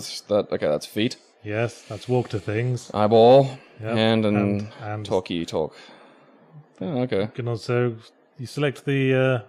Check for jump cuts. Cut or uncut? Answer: uncut